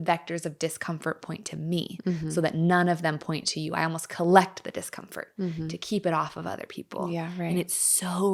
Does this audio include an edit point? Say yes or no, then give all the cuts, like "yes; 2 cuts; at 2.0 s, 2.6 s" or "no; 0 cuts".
no; 0 cuts